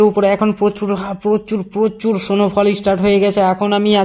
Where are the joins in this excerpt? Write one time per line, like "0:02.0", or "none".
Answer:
none

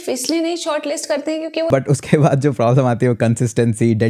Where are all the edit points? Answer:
0:01.7

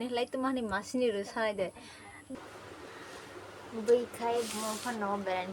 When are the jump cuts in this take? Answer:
0:02.3

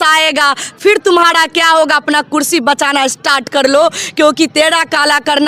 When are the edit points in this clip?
none

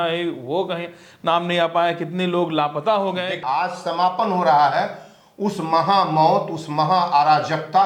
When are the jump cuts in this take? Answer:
0:03.4

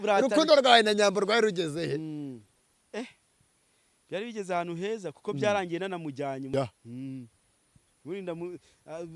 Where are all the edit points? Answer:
0:06.5

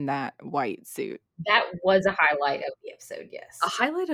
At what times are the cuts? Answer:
0:01.4
0:03.4

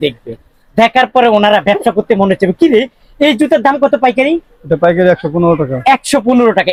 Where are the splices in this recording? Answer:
none

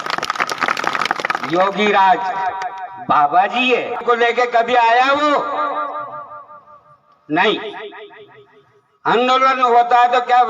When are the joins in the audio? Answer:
0:04.0

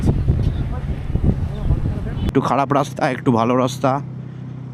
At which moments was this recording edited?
0:02.3

